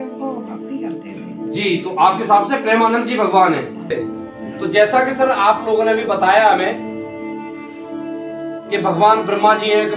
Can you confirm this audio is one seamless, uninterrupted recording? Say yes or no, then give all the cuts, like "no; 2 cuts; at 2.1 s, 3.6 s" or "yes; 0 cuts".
no; 1 cut; at 4.0 s